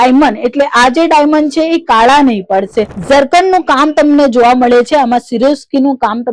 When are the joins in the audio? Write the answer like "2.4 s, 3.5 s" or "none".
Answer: 2.9 s